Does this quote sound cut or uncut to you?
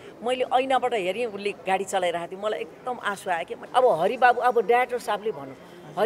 cut